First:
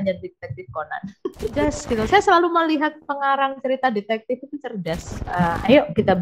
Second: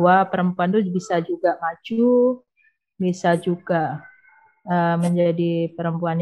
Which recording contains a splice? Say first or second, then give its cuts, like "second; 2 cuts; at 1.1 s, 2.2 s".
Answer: first; 2 cuts; at 1.6 s, 5.1 s